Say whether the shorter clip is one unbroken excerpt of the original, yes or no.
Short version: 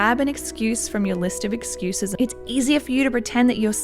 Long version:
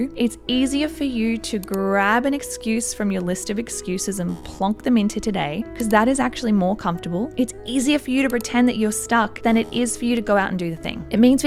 no